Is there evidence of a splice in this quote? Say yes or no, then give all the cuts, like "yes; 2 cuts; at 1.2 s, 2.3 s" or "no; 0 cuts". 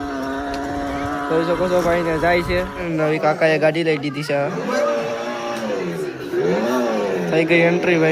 yes; 1 cut; at 2.8 s